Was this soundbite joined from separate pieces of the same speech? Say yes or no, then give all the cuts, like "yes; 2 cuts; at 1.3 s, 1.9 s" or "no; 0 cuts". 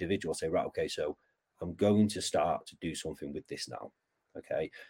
no; 0 cuts